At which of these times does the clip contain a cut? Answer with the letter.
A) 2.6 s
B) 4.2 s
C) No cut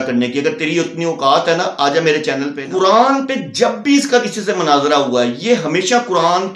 A